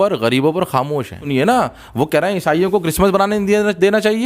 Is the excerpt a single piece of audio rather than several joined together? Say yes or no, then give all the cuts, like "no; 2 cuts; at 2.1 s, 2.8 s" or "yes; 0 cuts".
no; 1 cut; at 1.2 s